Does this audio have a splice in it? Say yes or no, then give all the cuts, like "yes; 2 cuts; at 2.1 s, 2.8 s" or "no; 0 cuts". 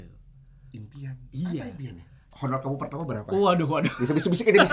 yes; 1 cut; at 2.3 s